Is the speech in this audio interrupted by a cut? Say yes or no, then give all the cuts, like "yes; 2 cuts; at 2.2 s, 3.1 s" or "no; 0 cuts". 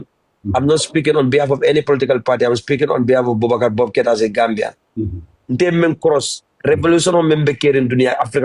no; 0 cuts